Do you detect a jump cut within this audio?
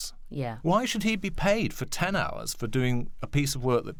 no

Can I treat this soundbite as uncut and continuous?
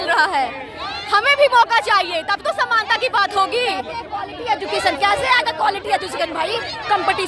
yes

